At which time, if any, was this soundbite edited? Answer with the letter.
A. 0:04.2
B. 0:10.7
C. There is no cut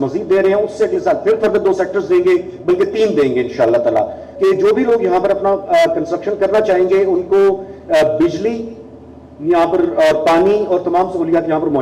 A